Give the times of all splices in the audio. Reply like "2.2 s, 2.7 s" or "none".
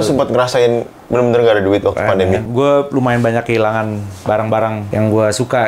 2.5 s, 4.8 s